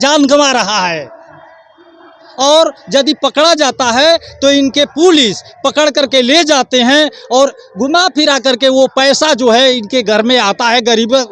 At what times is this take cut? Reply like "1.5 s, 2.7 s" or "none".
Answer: none